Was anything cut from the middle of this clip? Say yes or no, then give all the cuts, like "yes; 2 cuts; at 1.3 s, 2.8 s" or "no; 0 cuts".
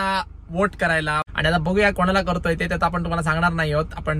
yes; 1 cut; at 1.2 s